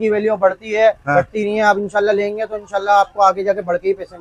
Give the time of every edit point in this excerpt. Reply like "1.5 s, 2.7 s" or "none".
none